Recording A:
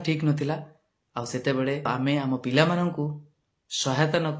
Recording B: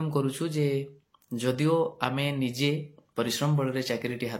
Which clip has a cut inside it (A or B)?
A